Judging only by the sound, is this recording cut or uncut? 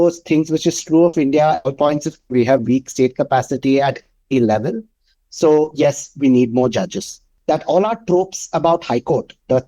cut